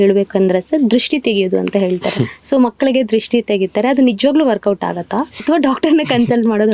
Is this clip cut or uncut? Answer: cut